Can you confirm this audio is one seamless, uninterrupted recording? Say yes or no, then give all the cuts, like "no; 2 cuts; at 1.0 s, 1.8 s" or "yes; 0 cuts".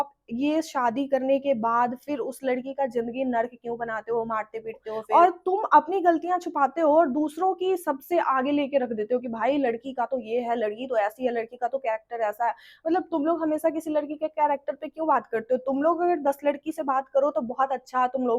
no; 1 cut; at 4.9 s